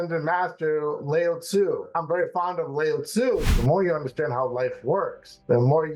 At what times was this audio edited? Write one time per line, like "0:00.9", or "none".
0:01.9
0:03.5